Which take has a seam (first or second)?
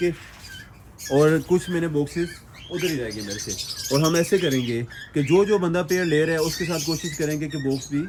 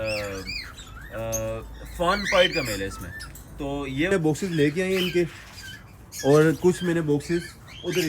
second